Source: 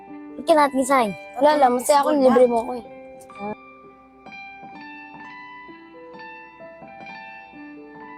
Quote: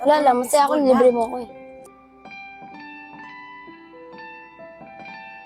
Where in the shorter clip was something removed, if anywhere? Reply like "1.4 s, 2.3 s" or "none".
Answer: 1.9 s